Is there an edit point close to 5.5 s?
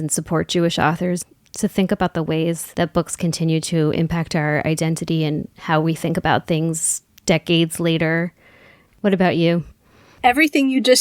no; 1 cut; at 1.3 s

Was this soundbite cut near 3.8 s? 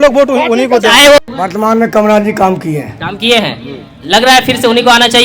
no; 1 cut; at 1.2 s

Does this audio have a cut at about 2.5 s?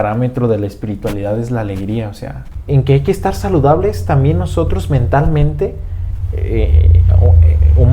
yes; 1 cut; at 2.5 s

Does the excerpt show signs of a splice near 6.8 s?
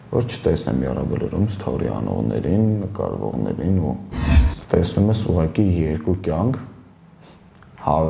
no; 1 cut; at 4.6 s

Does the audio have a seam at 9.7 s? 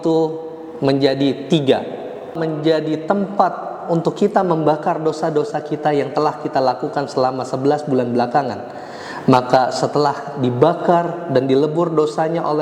no; 1 cut; at 2.3 s

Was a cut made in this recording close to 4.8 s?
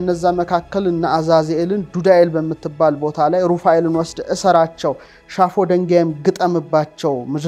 no; 0 cuts

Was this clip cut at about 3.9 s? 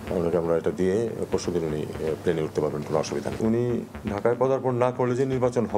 yes; 2 cuts; at 3.3 s, 3.9 s

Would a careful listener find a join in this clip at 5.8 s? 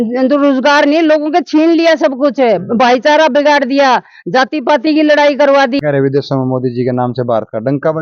yes; 1 cut; at 5.8 s

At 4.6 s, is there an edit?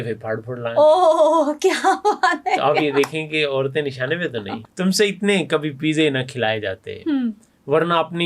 yes; 1 cut; at 4.6 s

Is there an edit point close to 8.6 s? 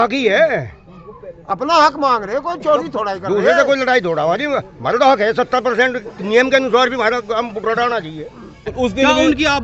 yes; 1 cut; at 8.6 s

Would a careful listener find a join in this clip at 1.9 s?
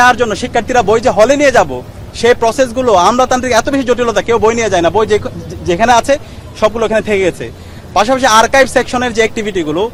no; 0 cuts

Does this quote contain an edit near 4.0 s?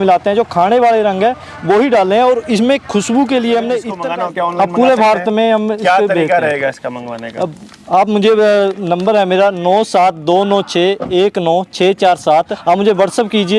yes; 2 cuts; at 4.0 s, 12.5 s

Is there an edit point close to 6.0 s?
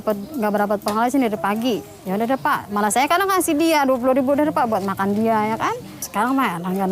yes; 1 cut; at 6.0 s

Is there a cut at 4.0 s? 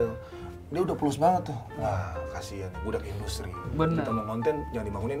yes; 1 cut; at 4.0 s

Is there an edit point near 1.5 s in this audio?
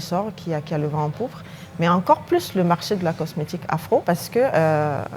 no; 1 cut; at 4.0 s

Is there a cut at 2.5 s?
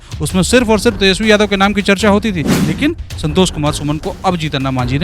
yes; 1 cut; at 2.5 s

